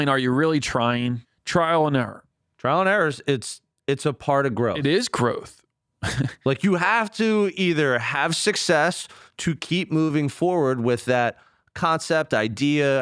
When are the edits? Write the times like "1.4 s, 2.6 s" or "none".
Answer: 1.3 s